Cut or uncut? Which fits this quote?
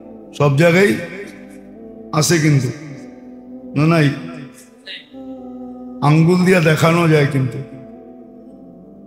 uncut